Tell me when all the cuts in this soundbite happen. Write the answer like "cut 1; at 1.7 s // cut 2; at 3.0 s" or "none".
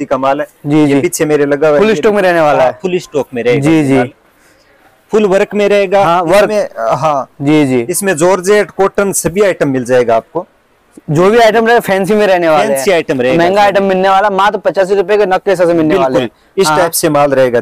none

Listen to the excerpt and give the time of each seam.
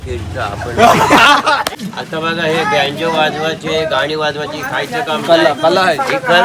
cut 1; at 1.8 s

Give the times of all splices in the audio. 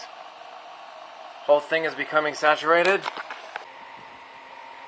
cut 1; at 3.6 s

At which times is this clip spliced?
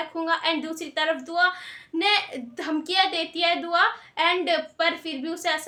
none

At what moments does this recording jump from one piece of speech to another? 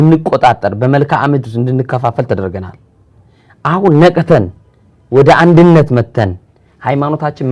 none

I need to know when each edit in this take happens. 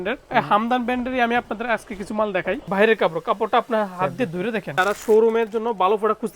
cut 1; at 2.6 s // cut 2; at 4.8 s

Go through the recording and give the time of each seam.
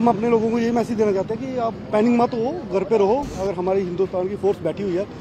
cut 1; at 3.3 s

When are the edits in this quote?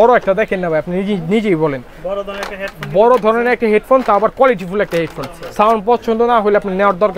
none

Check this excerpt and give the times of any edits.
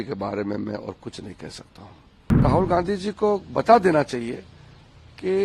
cut 1; at 2.4 s

